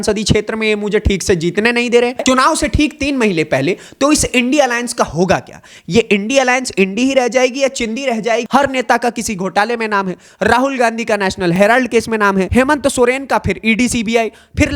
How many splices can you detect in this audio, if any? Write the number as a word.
three